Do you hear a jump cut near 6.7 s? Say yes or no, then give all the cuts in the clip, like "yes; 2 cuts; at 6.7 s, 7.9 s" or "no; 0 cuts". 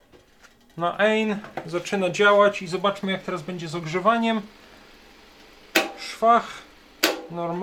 no; 0 cuts